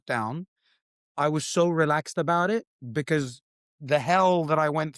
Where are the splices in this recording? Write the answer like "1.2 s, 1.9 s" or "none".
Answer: none